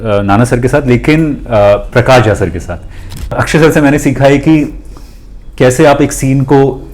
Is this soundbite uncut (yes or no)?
no